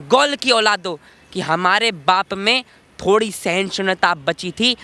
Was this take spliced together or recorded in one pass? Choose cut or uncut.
uncut